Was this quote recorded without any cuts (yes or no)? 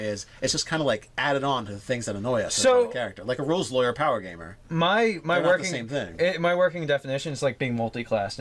yes